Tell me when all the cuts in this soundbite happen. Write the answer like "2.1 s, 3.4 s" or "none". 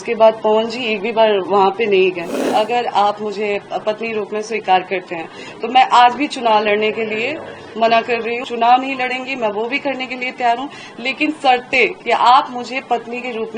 2.4 s, 8.4 s